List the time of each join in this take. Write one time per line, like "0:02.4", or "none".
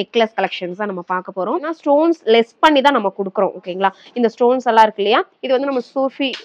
0:01.7